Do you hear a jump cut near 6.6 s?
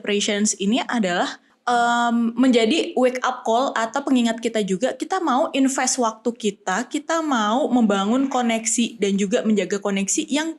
no; 1 cut; at 1.5 s

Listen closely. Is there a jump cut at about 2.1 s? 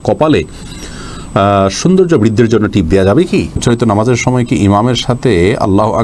no; 1 cut; at 3.6 s

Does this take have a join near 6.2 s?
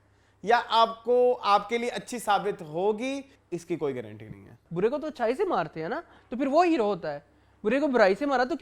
no; 2 cuts; at 3.3 s, 4.6 s

